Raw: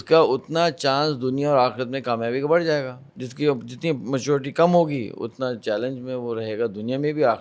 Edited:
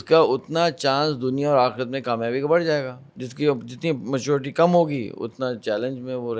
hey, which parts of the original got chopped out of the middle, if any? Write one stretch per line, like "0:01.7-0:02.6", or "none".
none